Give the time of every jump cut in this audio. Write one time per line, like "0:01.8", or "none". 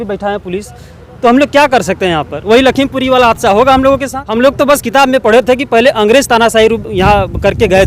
0:04.2